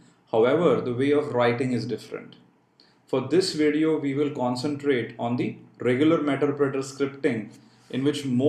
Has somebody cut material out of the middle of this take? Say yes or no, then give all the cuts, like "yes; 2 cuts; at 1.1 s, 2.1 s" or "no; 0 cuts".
no; 0 cuts